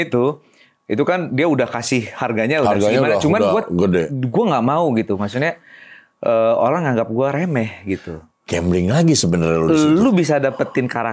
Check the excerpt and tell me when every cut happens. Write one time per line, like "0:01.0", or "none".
none